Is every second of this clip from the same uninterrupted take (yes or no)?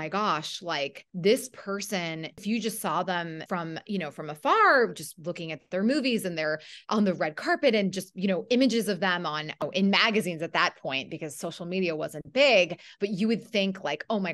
no